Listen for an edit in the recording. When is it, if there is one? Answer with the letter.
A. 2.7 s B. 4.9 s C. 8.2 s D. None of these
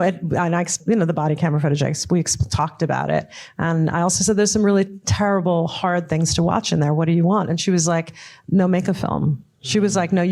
D